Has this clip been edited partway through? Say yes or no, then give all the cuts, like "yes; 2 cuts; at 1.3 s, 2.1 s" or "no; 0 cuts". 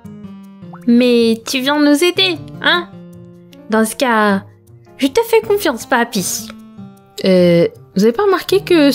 no; 0 cuts